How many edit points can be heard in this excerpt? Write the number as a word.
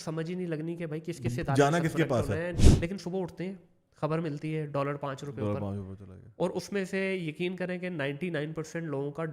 one